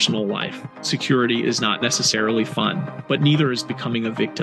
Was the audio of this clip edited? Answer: no; 0 cuts

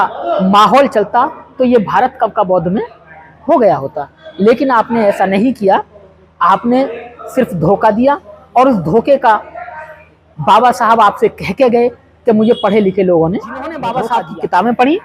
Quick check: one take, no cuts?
no; 1 cut; at 13.9 s

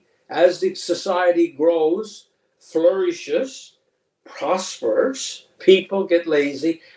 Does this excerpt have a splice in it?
no; 0 cuts

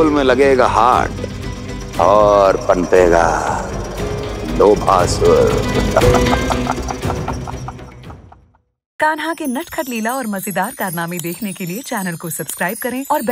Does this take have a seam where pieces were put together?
yes; 1 cut; at 8.8 s

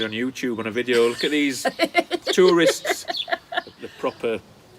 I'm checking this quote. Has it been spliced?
yes; 1 cut; at 3.8 s

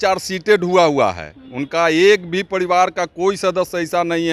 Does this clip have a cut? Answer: no; 0 cuts

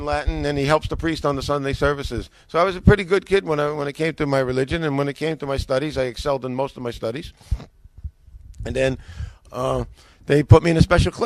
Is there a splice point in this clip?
yes; 1 cut; at 8.6 s

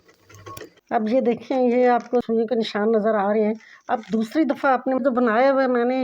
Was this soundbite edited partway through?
yes; 2 cuts; at 2.3 s, 5.0 s

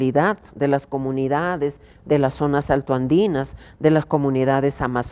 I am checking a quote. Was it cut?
no; 0 cuts

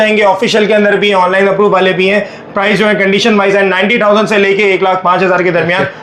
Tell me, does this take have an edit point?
no; 0 cuts

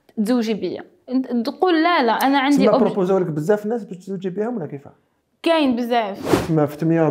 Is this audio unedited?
no; 1 cut; at 6.2 s

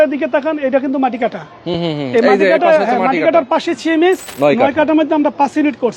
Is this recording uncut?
no; 1 cut; at 4.3 s

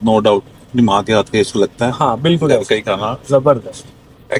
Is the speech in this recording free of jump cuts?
yes; 0 cuts

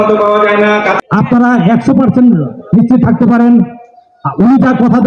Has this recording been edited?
yes; 1 cut; at 1.0 s

